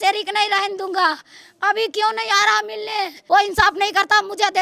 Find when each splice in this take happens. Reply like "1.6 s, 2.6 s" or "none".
3.1 s